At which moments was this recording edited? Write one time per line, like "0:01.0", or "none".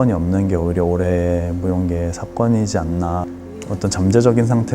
0:03.2